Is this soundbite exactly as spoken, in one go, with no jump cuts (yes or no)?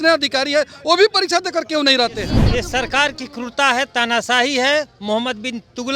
no